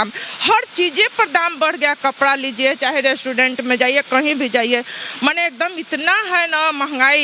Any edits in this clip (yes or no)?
no